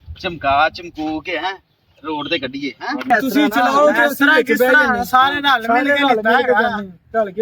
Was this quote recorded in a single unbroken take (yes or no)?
no